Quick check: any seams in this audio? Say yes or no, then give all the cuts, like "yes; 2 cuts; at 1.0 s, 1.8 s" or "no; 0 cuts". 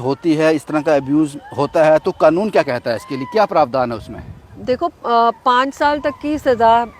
no; 0 cuts